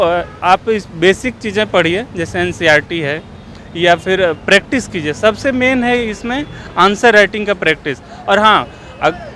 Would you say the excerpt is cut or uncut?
uncut